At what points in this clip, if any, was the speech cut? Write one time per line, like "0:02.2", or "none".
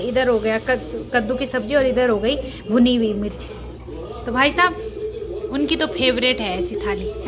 none